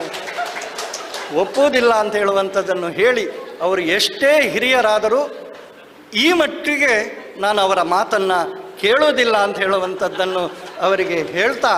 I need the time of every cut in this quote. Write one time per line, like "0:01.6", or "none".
none